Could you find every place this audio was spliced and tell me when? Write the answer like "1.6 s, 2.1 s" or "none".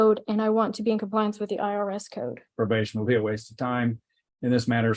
2.5 s